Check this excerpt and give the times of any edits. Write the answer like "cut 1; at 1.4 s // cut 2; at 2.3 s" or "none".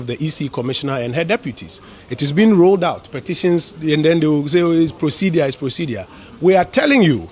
none